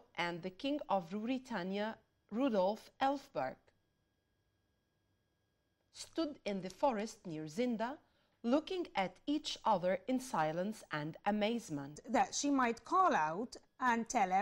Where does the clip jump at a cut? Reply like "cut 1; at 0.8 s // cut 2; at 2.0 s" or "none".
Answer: cut 1; at 12.0 s